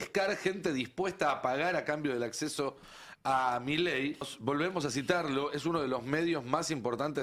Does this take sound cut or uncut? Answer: cut